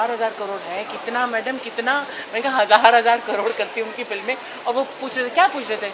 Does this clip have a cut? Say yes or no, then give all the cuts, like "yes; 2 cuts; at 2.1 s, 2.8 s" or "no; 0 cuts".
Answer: no; 0 cuts